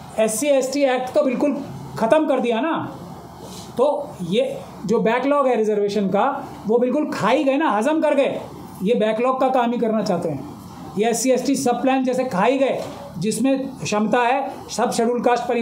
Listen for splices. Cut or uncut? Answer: uncut